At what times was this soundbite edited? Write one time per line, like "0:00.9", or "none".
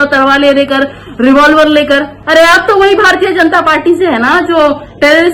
0:02.1